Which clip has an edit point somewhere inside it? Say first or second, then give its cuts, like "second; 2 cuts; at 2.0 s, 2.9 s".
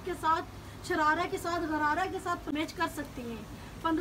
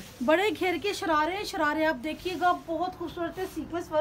first; 1 cut; at 2.5 s